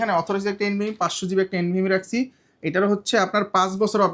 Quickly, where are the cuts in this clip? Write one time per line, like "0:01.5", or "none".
none